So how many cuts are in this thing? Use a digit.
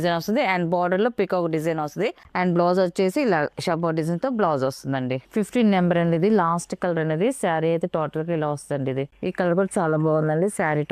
2